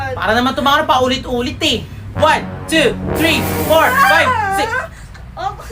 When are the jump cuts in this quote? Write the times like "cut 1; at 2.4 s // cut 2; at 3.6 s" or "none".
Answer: cut 1; at 2.0 s